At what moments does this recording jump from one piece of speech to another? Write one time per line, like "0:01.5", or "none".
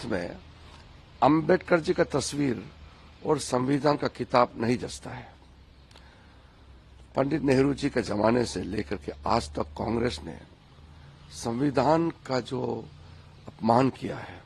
none